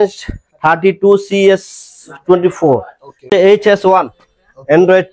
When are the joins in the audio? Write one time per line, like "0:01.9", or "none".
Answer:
0:03.3